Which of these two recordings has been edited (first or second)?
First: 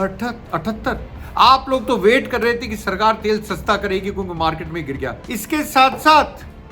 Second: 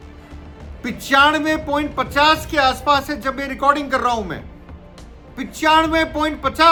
first